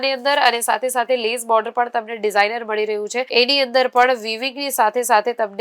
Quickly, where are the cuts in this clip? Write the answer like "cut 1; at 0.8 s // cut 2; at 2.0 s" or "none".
none